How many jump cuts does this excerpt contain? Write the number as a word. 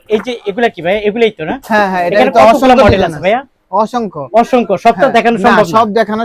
zero